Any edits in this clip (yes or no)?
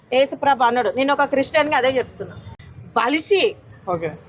yes